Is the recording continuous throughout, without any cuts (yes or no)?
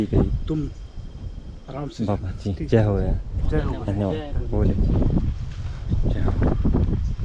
yes